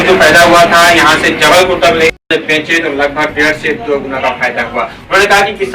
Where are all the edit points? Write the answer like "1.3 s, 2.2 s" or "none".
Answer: 2.2 s